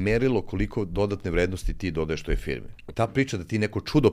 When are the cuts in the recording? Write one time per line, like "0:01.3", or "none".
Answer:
0:02.8